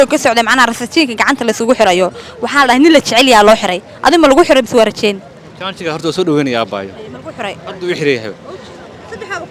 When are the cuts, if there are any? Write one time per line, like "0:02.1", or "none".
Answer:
none